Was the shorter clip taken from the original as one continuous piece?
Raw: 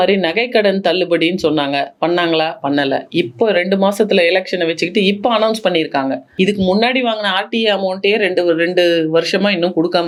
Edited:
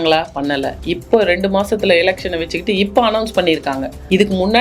yes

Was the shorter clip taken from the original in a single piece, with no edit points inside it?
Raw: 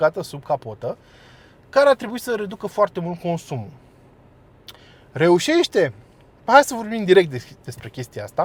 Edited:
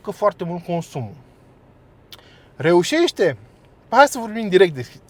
yes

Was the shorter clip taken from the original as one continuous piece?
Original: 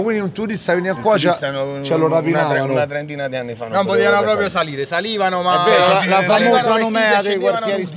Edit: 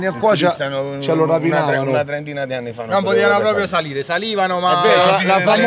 yes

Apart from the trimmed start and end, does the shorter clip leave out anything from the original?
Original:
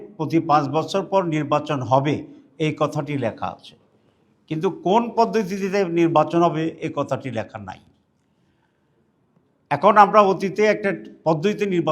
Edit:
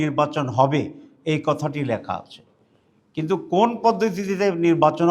no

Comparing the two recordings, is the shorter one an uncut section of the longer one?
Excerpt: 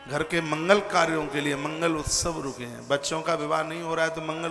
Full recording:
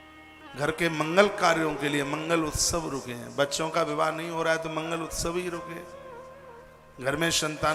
yes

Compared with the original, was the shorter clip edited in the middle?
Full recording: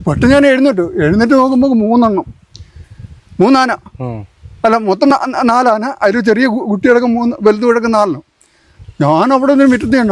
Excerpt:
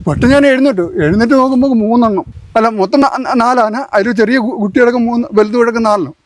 yes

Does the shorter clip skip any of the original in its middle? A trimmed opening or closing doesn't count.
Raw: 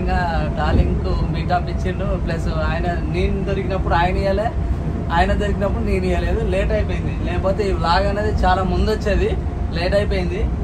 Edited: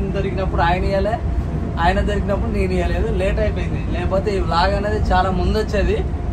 no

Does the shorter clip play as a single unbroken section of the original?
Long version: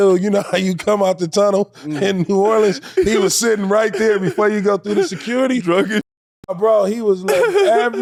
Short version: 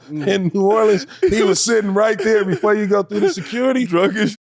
yes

